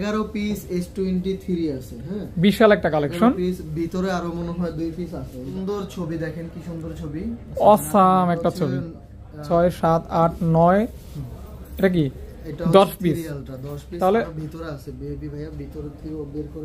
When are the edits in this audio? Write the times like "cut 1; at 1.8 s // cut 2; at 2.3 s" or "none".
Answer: cut 1; at 5.6 s // cut 2; at 9.4 s